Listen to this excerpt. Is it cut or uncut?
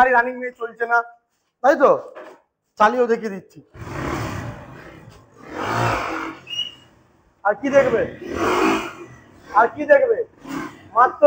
uncut